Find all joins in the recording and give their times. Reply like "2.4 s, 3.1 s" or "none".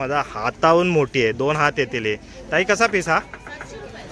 none